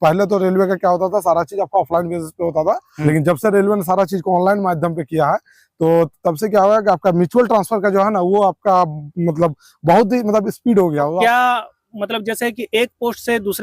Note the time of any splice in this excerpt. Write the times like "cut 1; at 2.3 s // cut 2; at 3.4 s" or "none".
cut 1; at 2.9 s // cut 2; at 11.2 s

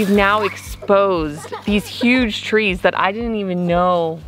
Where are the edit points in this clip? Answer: none

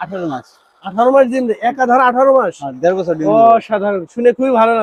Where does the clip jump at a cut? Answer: none

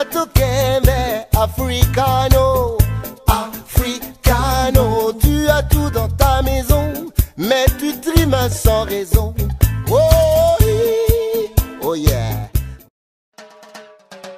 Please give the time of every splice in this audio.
cut 1; at 13.4 s

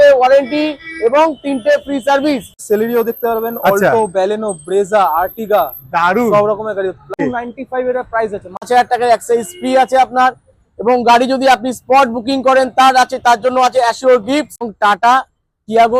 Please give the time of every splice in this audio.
cut 1; at 2.6 s // cut 2; at 7.2 s // cut 3; at 8.7 s // cut 4; at 14.6 s

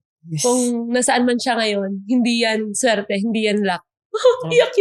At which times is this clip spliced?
none

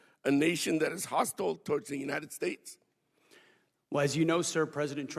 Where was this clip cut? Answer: none

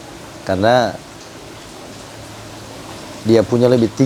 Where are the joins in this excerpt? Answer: none

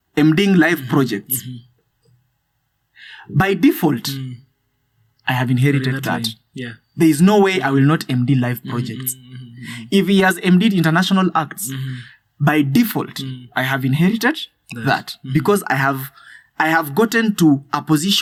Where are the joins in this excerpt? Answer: none

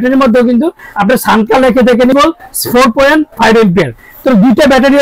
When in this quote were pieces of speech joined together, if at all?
cut 1; at 2.1 s

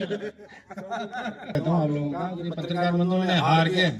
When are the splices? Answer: cut 1; at 1.5 s

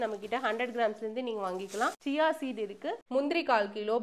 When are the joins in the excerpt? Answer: cut 1; at 2.0 s // cut 2; at 3.0 s

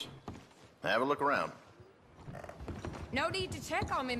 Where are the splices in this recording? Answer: cut 1; at 2.3 s

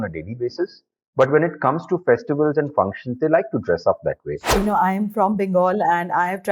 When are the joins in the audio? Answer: cut 1; at 4.5 s

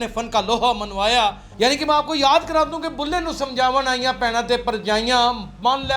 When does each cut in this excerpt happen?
cut 1; at 1.4 s

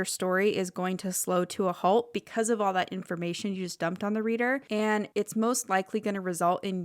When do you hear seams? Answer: cut 1; at 4.9 s

